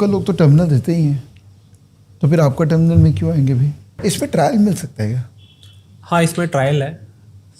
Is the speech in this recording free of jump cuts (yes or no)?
no